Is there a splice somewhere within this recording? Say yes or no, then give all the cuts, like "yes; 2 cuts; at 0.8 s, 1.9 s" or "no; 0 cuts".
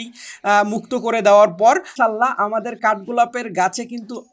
yes; 1 cut; at 1.9 s